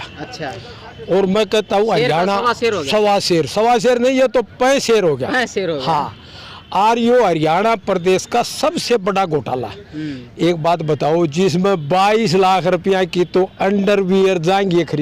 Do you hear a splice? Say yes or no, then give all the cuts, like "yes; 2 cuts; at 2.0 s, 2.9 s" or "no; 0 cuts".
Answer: no; 0 cuts